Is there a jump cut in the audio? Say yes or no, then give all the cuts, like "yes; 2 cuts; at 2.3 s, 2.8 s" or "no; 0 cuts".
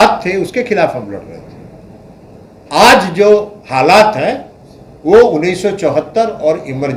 no; 0 cuts